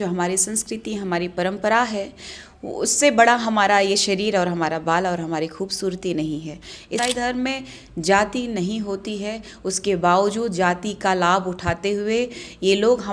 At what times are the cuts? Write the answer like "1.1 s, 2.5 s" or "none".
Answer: 7.0 s